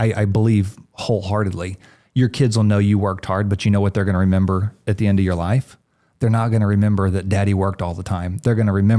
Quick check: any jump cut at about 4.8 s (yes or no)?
no